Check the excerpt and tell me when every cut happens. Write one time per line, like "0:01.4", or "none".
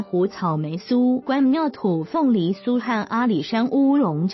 0:01.2